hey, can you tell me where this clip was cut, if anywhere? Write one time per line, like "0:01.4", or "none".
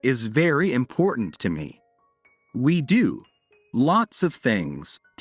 none